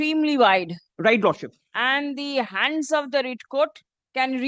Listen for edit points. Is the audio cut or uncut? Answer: uncut